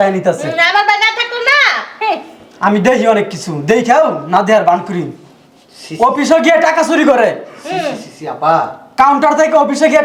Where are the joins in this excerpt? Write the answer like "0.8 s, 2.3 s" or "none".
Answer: none